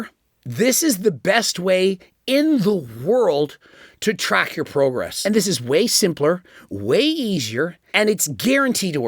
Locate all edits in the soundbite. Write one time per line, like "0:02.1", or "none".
0:05.1
0:07.8